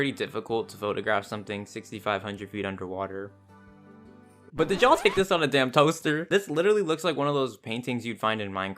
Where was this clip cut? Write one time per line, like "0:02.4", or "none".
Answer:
none